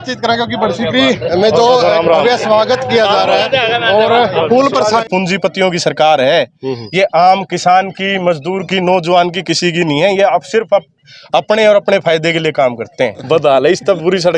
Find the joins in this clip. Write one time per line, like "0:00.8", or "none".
0:05.0
0:13.2